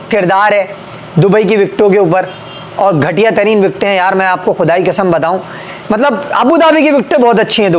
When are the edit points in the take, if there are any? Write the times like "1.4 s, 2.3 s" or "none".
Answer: none